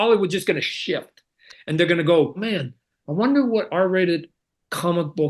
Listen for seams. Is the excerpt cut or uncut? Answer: cut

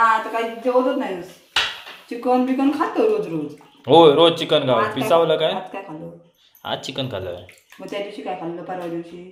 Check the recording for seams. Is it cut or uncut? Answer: uncut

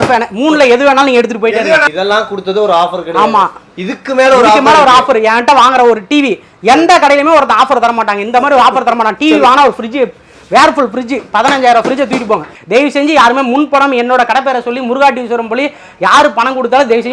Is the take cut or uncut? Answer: cut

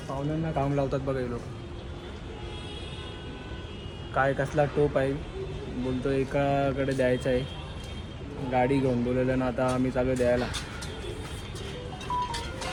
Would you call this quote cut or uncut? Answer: uncut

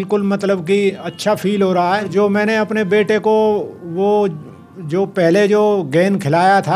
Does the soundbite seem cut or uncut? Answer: cut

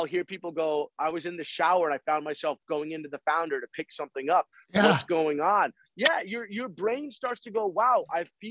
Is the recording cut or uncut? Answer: uncut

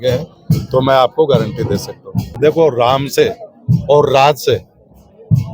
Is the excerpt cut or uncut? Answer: cut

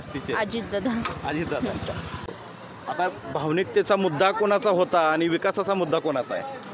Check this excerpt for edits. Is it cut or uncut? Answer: cut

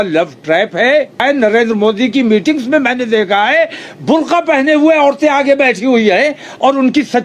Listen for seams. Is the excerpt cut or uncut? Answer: cut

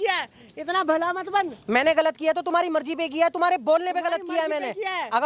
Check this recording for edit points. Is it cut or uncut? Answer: uncut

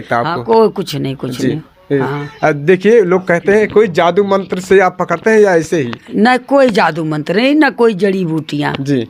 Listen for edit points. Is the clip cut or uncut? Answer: uncut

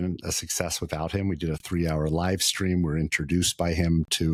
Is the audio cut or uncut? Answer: uncut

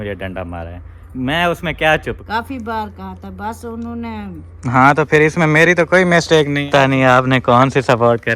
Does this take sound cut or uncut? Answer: cut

